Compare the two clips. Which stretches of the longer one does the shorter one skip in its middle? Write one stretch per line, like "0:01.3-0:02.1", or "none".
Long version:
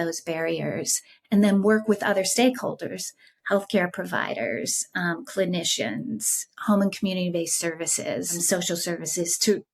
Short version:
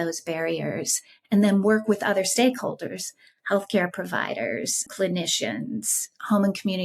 0:04.9-0:05.2